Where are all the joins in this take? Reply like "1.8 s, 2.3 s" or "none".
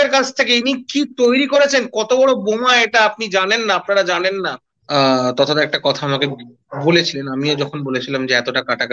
4.7 s